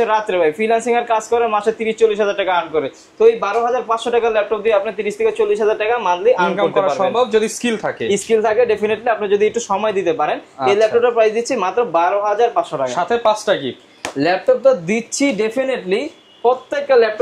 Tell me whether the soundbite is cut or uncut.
uncut